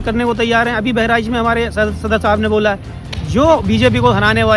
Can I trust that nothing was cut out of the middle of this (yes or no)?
no